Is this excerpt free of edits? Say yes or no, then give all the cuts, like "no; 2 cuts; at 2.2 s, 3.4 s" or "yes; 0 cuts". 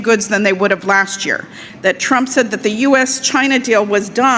no; 1 cut; at 1.7 s